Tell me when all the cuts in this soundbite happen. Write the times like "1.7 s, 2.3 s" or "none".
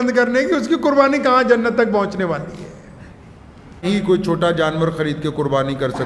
3.8 s